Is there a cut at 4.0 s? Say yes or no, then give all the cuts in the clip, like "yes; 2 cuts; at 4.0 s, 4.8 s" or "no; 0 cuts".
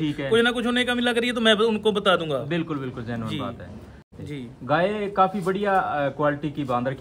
yes; 1 cut; at 4.0 s